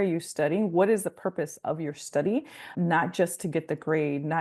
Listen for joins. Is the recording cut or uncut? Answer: cut